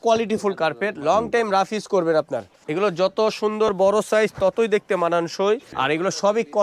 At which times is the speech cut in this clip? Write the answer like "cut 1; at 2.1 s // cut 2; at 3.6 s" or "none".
cut 1; at 2.6 s // cut 2; at 5.7 s